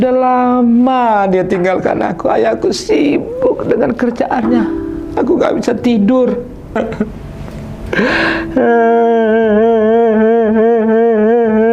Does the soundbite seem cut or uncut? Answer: cut